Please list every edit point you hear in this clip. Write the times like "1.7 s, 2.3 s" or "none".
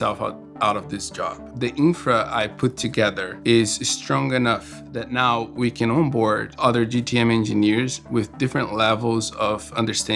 1.5 s, 6.5 s